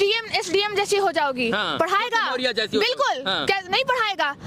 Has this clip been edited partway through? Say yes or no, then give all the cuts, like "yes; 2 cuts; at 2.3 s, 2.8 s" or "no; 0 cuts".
no; 0 cuts